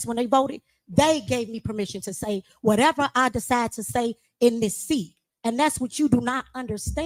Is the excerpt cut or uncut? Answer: uncut